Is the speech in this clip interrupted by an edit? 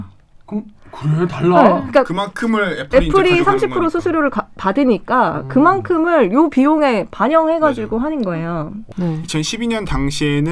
yes; 1 cut; at 8.8 s

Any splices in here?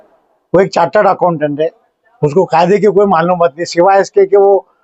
no; 0 cuts

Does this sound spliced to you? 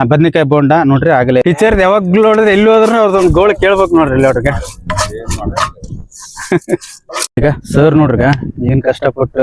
yes; 2 cuts; at 1.4 s, 7.4 s

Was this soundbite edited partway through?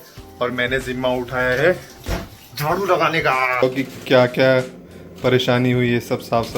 yes; 1 cut; at 3.6 s

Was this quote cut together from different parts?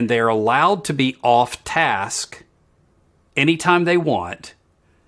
no; 0 cuts

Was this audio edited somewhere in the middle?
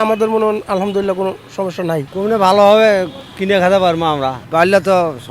yes; 1 cut; at 2.1 s

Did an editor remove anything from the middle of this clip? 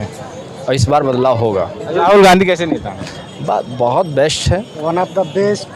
yes; 1 cut; at 1.9 s

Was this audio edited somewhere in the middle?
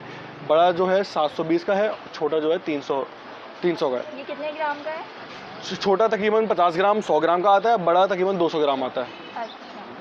no; 0 cuts

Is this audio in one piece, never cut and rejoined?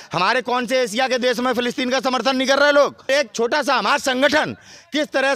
no; 1 cut; at 3.1 s

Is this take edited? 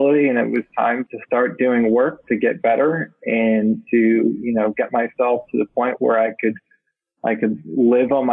yes; 1 cut; at 1.0 s

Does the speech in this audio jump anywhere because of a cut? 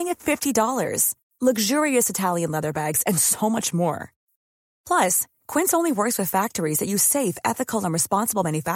no; 0 cuts

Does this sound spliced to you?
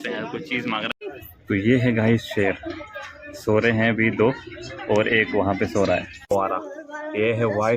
yes; 2 cuts; at 0.9 s, 6.3 s

